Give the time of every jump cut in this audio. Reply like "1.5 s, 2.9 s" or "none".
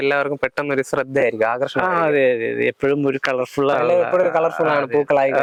none